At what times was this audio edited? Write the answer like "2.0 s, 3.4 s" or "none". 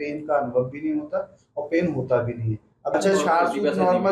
2.9 s